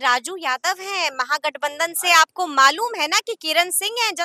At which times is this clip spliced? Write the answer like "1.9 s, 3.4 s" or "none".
none